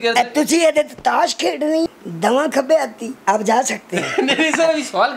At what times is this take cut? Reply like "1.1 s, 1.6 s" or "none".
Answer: 1.9 s, 3.0 s